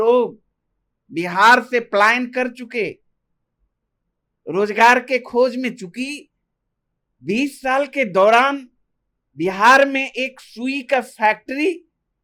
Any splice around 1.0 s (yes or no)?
no